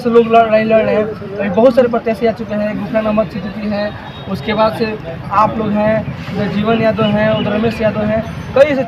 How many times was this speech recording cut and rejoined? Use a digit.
0